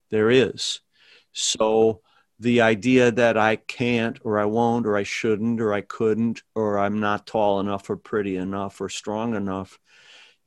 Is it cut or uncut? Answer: uncut